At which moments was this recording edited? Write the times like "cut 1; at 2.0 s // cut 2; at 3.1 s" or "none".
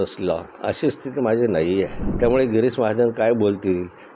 cut 1; at 2.0 s